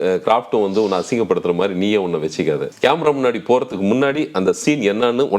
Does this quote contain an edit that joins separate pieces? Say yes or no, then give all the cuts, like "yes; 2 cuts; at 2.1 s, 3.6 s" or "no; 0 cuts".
yes; 1 cut; at 2.7 s